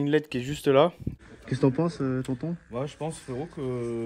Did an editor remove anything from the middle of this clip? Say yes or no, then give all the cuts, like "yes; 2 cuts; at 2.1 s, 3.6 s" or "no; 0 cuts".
yes; 1 cut; at 1.1 s